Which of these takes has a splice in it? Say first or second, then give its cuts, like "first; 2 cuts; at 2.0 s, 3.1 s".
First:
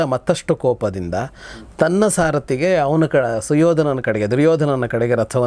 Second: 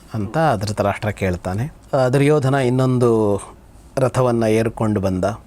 second; 1 cut; at 1.7 s